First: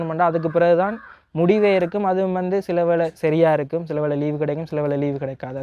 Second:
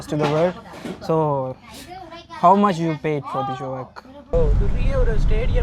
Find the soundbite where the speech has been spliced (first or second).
second